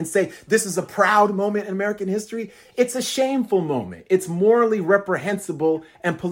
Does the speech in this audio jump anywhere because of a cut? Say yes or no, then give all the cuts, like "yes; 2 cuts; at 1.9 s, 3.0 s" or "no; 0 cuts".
no; 0 cuts